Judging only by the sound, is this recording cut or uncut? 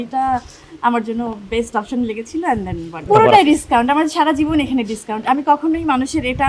cut